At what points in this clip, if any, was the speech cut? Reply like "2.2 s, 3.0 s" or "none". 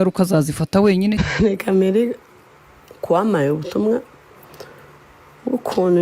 1.2 s

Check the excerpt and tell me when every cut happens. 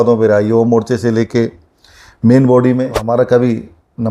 3.0 s

